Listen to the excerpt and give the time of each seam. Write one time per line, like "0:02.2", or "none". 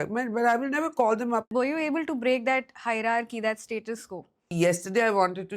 0:01.5
0:04.5